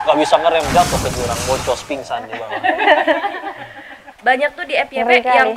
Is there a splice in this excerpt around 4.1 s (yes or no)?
yes